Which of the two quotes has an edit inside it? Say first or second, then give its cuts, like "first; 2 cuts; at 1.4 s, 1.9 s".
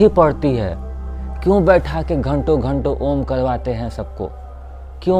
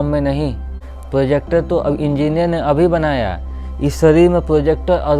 second; 1 cut; at 0.9 s